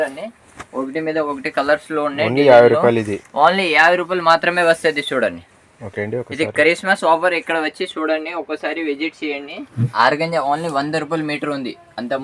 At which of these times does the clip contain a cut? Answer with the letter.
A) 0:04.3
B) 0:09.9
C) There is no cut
B